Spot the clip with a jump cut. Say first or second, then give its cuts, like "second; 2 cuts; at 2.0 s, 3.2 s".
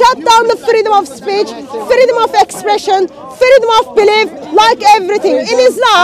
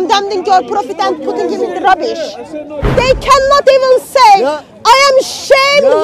second; 1 cut; at 2.8 s